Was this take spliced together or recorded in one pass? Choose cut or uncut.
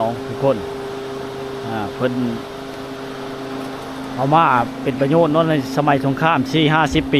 uncut